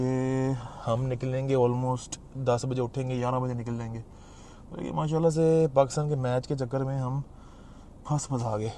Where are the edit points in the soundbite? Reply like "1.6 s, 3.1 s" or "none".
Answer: none